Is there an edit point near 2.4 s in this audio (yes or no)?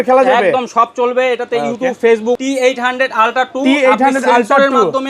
yes